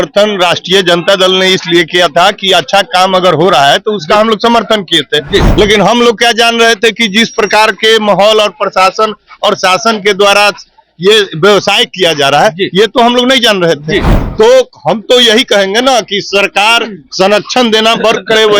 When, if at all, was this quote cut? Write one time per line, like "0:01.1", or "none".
none